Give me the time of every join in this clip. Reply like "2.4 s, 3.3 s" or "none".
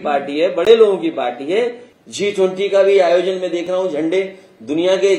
1.9 s

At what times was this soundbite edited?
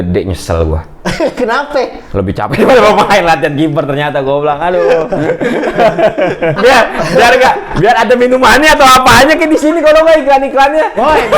6.6 s

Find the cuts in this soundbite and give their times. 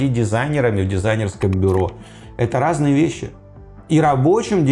none

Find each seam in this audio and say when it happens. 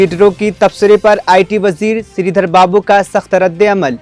none

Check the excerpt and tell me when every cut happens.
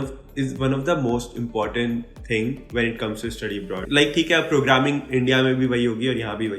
3.8 s

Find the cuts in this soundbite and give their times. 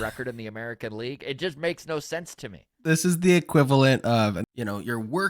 2.7 s, 4.4 s

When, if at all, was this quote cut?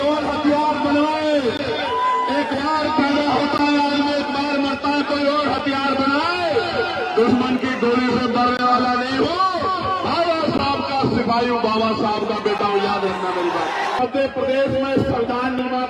14.0 s

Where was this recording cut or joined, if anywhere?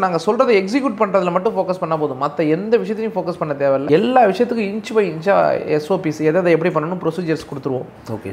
none

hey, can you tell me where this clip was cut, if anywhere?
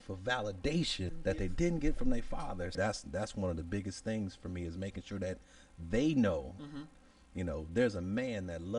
1.1 s, 2.7 s

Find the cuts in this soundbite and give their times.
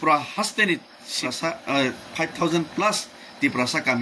1.2 s

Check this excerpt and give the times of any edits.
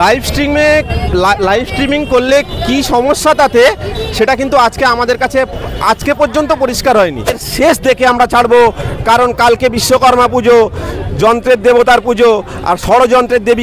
7.5 s

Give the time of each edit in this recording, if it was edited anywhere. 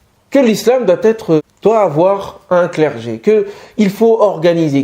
1.5 s

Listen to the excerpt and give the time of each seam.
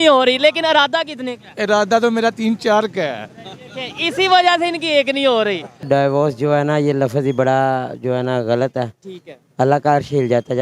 5.8 s

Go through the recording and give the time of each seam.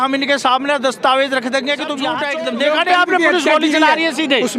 2.1 s

